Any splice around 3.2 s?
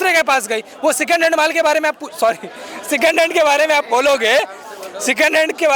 no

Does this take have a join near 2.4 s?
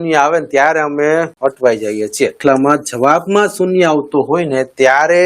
yes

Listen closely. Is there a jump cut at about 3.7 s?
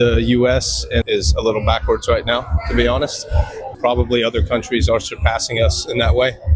yes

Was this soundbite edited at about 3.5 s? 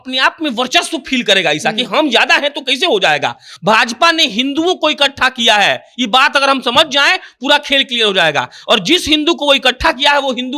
yes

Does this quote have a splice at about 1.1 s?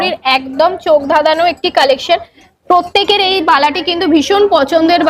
no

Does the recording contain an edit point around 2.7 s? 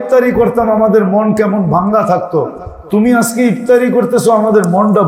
no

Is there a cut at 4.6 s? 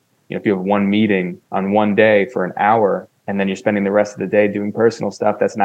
no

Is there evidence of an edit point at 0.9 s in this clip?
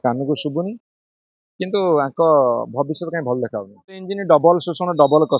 no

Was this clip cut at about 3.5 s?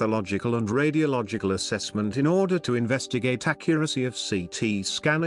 yes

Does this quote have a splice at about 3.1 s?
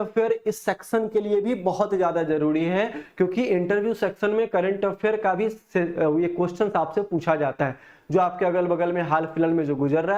no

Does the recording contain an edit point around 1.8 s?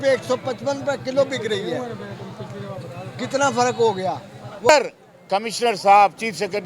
no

